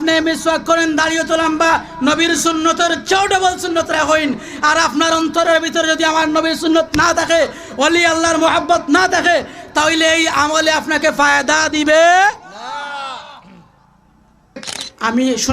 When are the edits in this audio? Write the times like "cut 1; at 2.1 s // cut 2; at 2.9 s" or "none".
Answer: cut 1; at 14.6 s